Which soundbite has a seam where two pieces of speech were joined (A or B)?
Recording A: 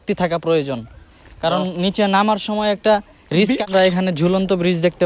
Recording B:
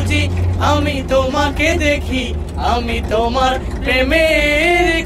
A